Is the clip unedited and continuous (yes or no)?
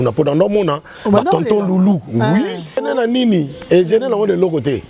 no